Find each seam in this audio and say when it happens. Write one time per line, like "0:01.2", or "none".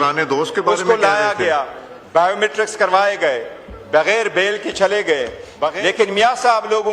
0:05.7